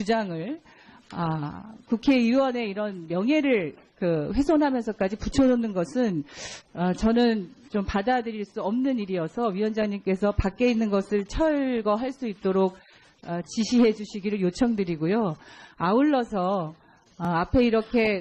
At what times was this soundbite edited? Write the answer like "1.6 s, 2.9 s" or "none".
11.7 s